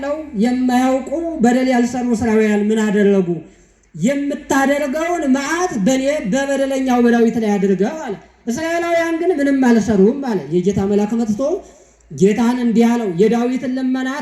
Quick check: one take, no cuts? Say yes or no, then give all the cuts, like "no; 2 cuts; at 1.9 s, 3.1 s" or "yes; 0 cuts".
yes; 0 cuts